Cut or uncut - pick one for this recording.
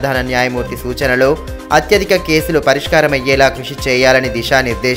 uncut